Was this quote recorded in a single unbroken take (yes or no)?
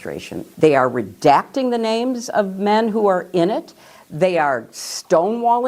no